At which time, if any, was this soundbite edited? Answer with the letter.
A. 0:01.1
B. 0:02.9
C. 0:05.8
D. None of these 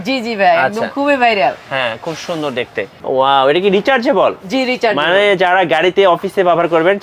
B